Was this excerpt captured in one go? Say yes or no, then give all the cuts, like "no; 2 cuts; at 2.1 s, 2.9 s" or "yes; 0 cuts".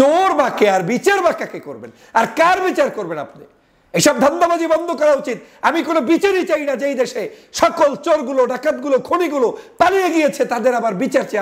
yes; 0 cuts